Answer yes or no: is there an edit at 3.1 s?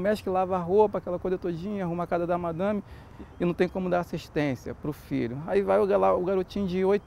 yes